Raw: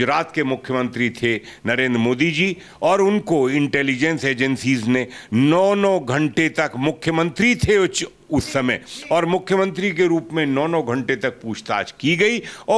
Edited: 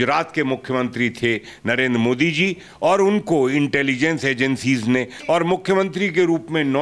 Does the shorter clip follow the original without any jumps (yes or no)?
no